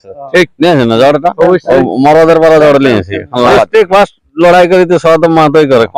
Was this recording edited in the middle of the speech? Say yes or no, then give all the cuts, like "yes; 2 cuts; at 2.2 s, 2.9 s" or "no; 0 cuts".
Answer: yes; 1 cut; at 3.5 s